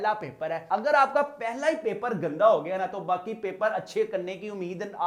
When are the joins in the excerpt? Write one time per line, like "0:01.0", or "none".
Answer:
none